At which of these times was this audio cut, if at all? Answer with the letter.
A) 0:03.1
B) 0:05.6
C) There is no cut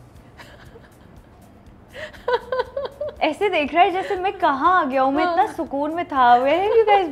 A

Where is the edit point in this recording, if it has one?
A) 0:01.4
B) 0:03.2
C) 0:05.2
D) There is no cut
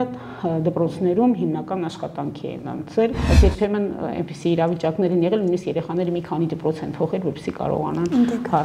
B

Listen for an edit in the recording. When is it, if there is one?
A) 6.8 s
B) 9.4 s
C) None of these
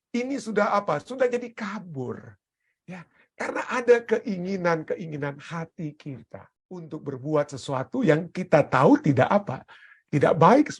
A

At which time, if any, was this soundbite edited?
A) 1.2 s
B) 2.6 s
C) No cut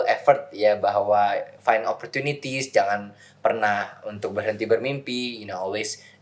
C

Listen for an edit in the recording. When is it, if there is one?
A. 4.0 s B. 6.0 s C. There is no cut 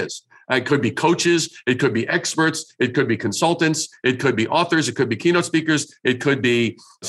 C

